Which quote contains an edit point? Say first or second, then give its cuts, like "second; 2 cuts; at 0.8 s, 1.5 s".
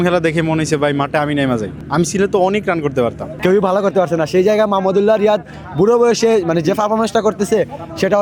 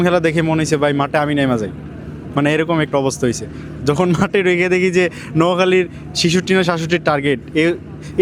first; 2 cuts; at 1.8 s, 3.3 s